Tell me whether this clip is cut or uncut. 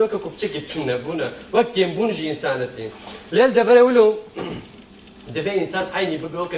cut